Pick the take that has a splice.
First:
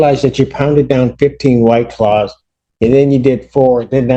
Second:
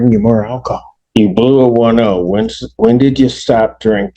second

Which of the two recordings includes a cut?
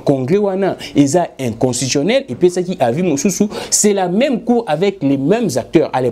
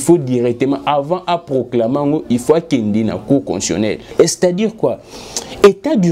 second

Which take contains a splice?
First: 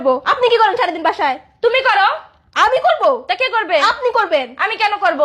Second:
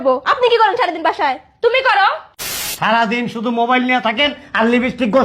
second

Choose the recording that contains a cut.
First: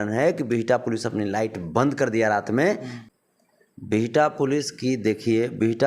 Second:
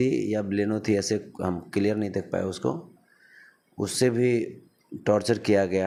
first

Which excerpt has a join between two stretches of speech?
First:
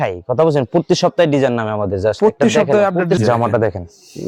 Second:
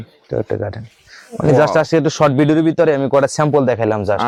first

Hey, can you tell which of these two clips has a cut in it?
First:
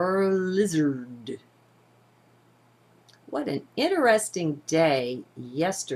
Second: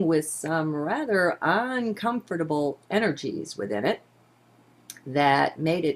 second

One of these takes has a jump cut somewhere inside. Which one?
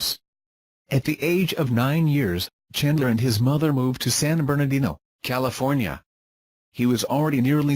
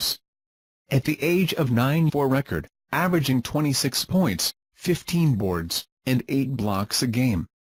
first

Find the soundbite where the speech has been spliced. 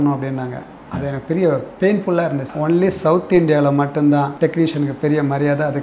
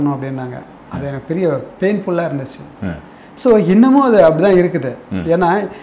first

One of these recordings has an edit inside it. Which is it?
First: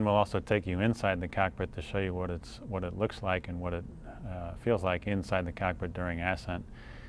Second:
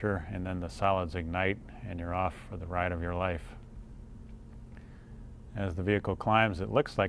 first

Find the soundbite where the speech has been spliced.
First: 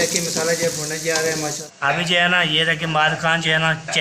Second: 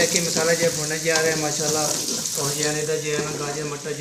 first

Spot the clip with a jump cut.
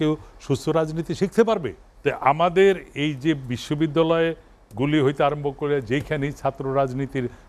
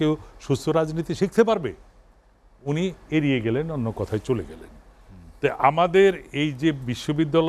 first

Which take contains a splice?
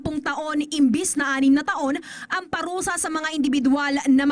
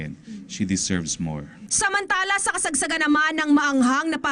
second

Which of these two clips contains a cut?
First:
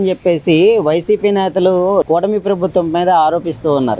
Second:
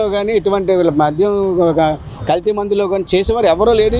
first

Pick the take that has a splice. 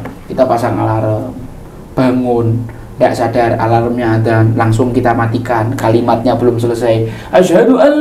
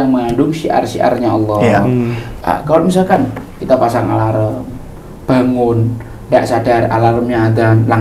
second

